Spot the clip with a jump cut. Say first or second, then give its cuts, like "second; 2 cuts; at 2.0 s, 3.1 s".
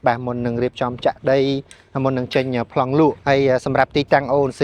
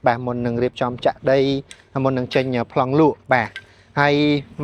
first; 1 cut; at 3.2 s